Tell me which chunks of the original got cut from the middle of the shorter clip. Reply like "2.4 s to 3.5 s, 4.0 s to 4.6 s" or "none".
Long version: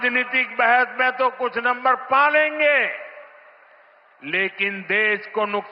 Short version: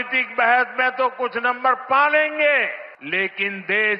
3.1 s to 4.1 s